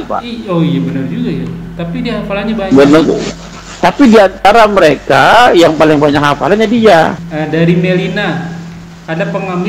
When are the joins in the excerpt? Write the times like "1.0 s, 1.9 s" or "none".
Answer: 7.2 s